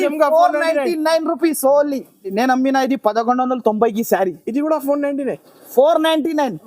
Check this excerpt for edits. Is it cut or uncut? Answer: cut